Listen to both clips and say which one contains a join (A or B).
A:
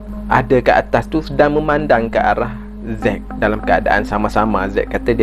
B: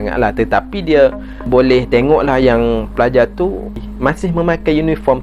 B